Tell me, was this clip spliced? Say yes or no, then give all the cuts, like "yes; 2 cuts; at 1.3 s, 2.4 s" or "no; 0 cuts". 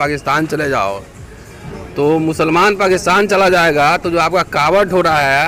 no; 0 cuts